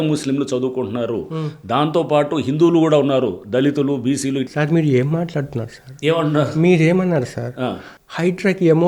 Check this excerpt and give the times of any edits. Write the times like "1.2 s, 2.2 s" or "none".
4.5 s